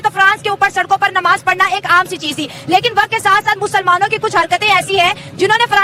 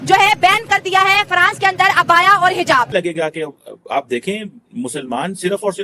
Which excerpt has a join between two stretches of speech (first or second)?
second